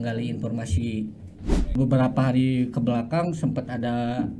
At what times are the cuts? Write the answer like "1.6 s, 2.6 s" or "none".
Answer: 1.8 s

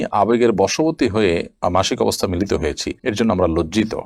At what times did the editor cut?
none

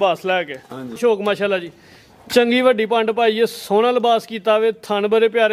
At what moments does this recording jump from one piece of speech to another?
1.0 s

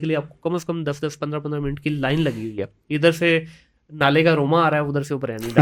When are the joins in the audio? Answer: none

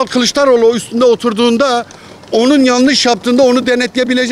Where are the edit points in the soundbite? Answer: none

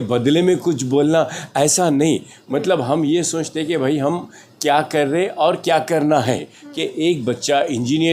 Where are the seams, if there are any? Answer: 6.6 s

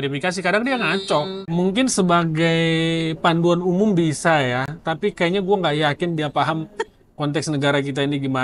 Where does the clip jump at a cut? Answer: 1.4 s

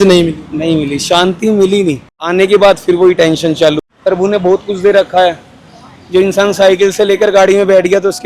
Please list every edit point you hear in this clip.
2.1 s, 3.9 s

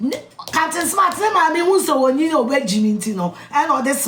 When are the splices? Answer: none

